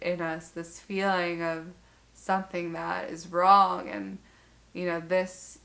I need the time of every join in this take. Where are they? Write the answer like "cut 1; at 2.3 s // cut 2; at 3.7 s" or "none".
none